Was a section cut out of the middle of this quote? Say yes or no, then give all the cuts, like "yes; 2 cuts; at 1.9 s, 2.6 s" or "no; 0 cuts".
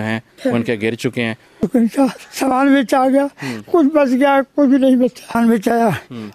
yes; 2 cuts; at 1.6 s, 5.4 s